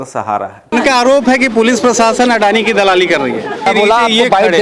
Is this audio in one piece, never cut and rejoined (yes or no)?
no